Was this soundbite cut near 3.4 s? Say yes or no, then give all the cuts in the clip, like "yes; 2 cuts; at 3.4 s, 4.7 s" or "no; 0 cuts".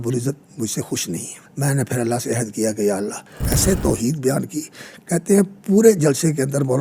yes; 2 cuts; at 1.4 s, 3.4 s